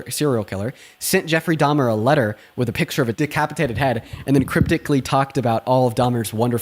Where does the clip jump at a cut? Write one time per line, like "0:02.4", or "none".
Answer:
0:03.2